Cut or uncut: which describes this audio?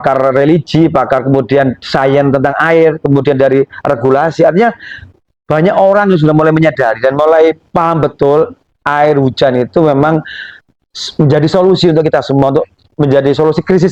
uncut